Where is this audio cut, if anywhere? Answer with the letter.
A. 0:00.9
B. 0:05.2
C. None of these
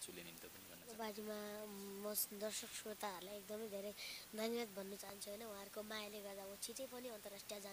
A